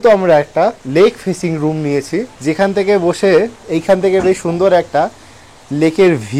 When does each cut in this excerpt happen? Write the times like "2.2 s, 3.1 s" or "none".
0.8 s, 2.3 s